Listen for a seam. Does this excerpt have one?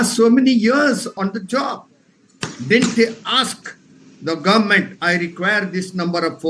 yes; 1 cut; at 1.1 s

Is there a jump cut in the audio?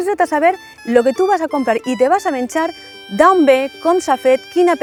no; 0 cuts

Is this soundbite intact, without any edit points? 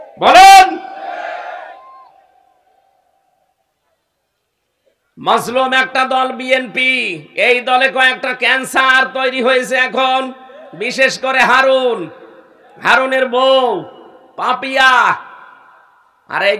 yes; 0 cuts

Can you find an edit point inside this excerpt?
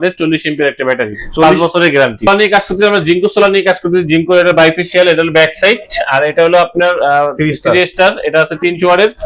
yes; 1 cut; at 2.3 s

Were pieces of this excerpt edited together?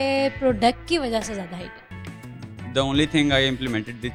no; 0 cuts

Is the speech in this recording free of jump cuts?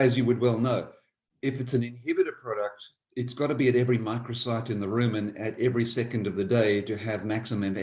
yes; 0 cuts

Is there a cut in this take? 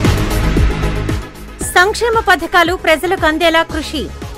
yes; 1 cut; at 1.0 s

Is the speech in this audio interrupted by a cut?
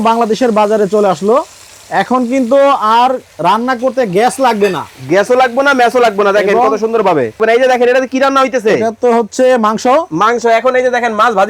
yes; 1 cut; at 7.4 s

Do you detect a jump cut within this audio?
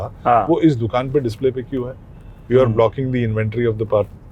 no; 0 cuts

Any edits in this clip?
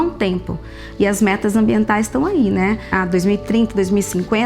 yes; 1 cut; at 2.9 s

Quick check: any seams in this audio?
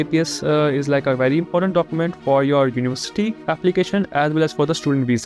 no; 0 cuts

